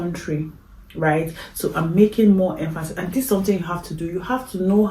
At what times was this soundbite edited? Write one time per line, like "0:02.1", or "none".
none